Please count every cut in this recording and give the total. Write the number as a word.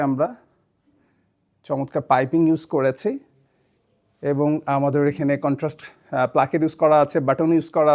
zero